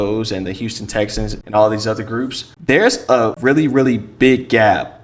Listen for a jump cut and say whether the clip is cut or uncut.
cut